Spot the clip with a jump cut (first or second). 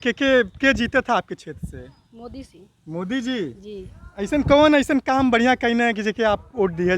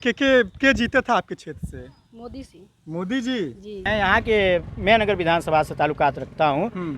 second